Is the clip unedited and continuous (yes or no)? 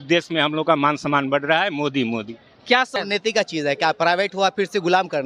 no